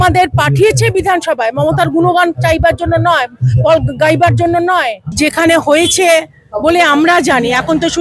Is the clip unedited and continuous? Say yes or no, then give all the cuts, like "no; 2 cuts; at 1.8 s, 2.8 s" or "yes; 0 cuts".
no; 1 cut; at 5.0 s